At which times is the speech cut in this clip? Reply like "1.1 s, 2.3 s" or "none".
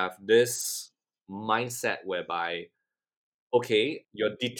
none